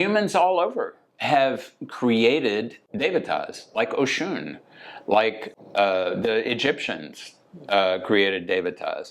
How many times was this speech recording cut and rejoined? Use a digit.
2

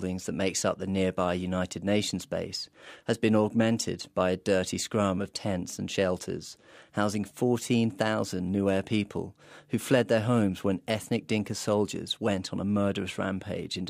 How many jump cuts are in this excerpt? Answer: 1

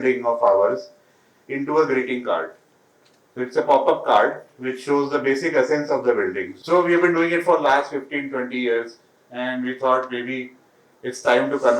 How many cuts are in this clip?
1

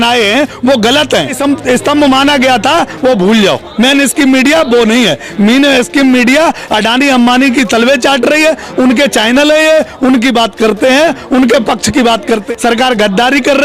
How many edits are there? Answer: 2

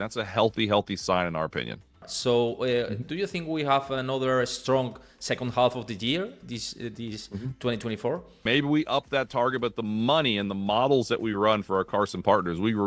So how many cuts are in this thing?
2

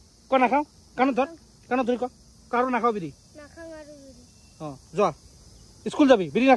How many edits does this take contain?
0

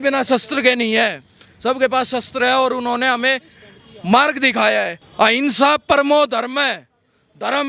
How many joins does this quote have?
1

